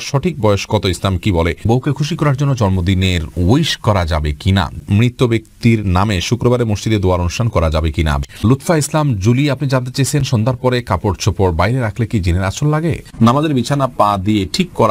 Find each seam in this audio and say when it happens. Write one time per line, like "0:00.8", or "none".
0:01.6
0:04.8
0:08.2
0:13.0